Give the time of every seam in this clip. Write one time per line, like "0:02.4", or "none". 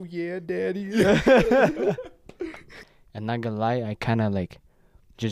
0:02.7